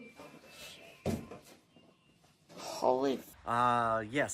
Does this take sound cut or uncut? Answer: cut